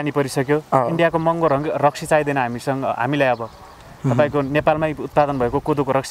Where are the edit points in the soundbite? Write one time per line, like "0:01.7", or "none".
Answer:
none

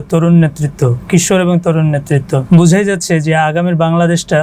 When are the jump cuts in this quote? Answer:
0:02.4

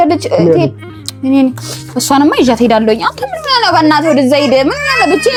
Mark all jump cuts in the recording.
none

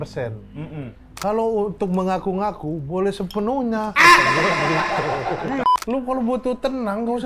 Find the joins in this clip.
0:05.6

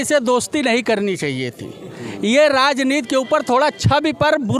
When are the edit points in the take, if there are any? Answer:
none

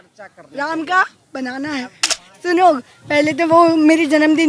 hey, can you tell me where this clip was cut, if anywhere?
0:02.3

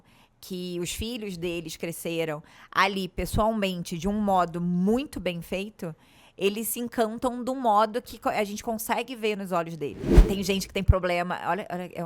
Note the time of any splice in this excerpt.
0:10.1

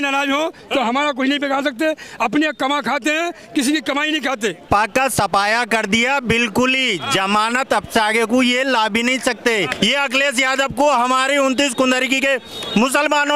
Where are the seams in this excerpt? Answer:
0:04.7
0:09.7

